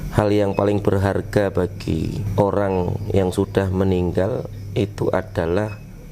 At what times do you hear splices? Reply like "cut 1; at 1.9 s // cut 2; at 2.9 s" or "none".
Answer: cut 1; at 2.2 s